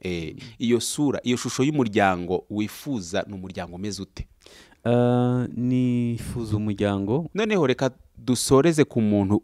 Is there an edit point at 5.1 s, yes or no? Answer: no